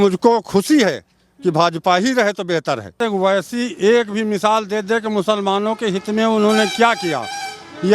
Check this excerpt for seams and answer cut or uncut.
cut